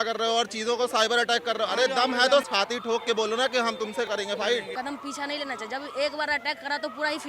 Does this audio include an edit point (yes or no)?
yes